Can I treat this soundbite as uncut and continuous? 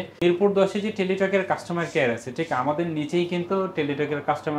yes; 0 cuts

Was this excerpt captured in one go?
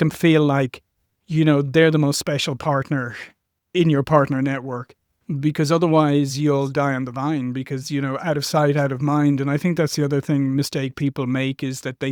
yes; 0 cuts

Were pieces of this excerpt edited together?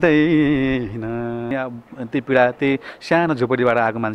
yes; 1 cut; at 1.5 s

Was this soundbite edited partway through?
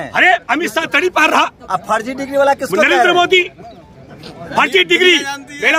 no; 0 cuts

